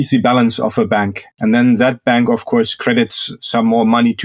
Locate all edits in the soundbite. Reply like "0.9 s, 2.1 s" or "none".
1.3 s